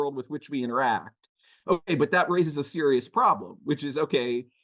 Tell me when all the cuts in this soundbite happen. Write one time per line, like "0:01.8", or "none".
none